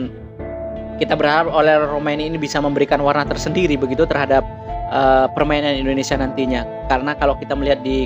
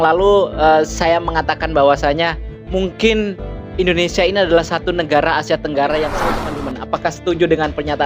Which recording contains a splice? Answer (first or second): second